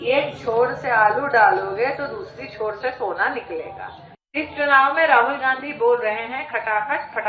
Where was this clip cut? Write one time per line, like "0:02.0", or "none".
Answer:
0:04.3